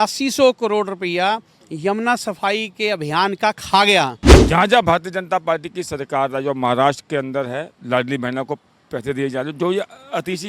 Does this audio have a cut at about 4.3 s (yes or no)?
yes